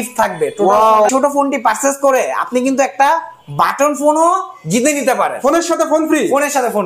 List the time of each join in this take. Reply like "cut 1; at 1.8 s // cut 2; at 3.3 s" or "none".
cut 1; at 1.1 s

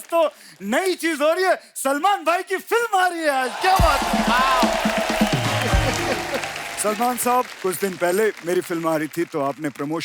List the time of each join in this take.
none

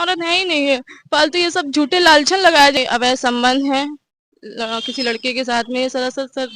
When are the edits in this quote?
cut 1; at 2.7 s

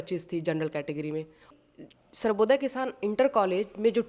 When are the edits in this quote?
cut 1; at 1.6 s

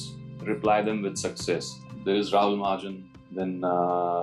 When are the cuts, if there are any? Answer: cut 1; at 1.8 s

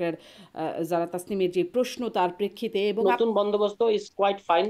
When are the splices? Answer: cut 1; at 3.0 s

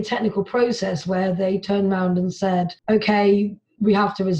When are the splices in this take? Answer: cut 1; at 2.8 s

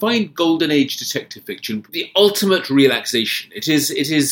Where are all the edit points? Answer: cut 1; at 1.8 s

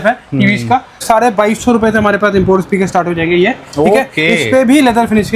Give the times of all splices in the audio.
cut 1; at 1.0 s

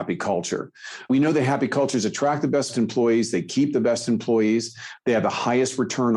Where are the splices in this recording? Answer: cut 1; at 1.1 s

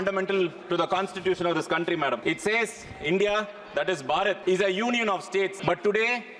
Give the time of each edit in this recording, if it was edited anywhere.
cut 1; at 2.2 s // cut 2; at 4.4 s // cut 3; at 5.6 s

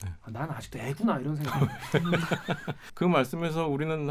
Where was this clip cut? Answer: cut 1; at 2.8 s

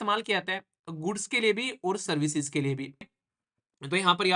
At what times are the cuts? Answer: cut 1; at 3.2 s

